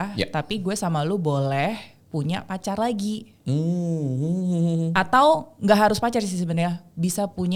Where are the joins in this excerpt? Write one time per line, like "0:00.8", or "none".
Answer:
none